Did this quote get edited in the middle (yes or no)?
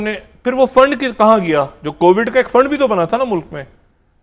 no